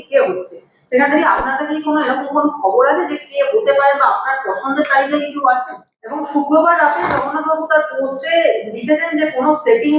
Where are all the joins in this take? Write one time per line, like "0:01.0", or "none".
0:06.2